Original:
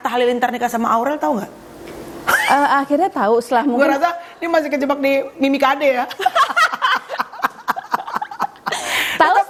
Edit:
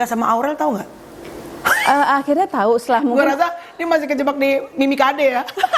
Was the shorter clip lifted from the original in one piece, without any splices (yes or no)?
yes